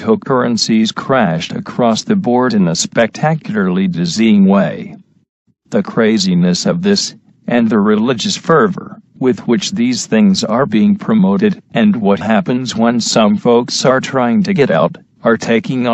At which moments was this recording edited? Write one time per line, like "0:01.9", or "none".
none